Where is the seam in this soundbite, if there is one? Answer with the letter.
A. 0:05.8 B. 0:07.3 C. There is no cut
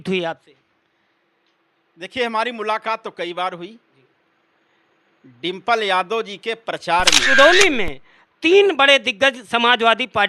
B